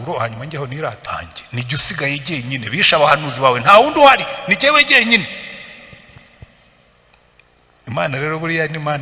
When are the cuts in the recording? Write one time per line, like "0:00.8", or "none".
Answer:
0:01.1